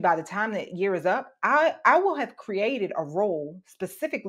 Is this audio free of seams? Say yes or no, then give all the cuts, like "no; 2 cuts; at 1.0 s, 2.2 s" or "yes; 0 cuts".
yes; 0 cuts